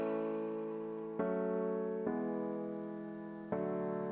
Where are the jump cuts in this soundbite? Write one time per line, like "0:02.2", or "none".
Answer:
0:02.8